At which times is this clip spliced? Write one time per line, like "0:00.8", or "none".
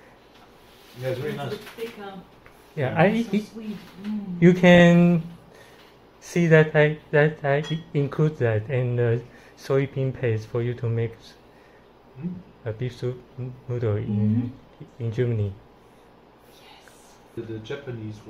none